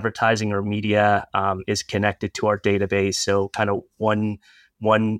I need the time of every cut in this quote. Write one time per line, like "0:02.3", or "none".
none